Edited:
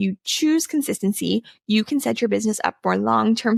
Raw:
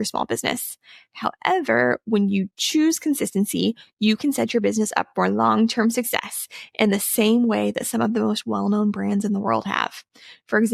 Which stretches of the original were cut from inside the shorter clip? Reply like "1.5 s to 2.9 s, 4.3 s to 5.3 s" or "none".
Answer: none